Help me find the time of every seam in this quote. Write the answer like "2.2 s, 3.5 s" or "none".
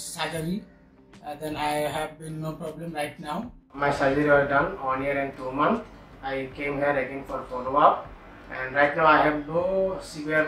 3.7 s